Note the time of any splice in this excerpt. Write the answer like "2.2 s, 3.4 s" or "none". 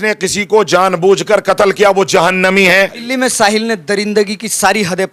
3.0 s